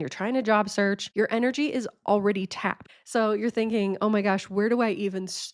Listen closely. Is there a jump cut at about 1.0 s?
yes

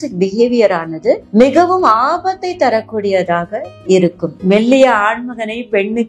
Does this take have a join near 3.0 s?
no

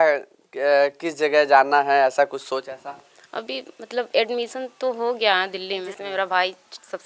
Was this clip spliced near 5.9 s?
yes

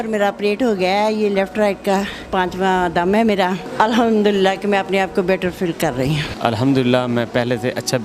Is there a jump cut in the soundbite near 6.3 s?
yes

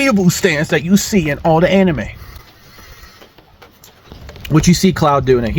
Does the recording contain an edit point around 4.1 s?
yes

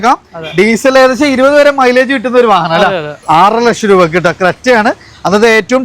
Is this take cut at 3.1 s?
yes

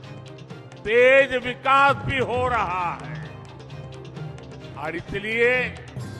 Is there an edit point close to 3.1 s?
yes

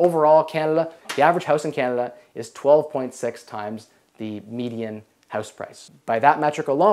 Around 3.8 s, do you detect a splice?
no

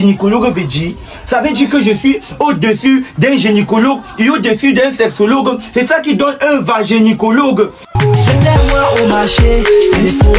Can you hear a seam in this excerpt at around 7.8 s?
yes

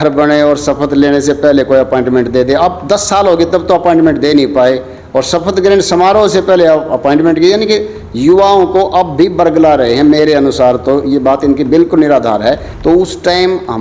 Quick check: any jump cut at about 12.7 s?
yes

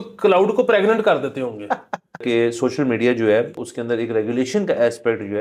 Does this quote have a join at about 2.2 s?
yes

